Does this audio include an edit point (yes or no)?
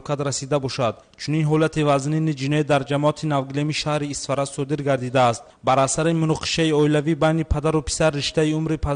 no